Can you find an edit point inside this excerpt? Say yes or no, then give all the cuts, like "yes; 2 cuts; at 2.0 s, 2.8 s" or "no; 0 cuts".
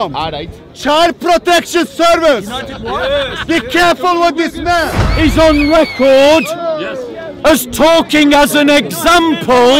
yes; 1 cut; at 5.0 s